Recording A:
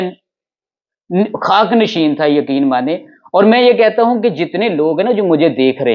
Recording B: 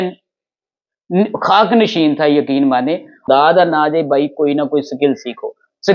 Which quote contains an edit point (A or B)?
B